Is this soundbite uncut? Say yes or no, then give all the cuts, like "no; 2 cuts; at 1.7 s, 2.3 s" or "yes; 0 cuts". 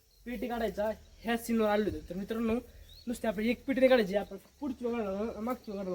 yes; 0 cuts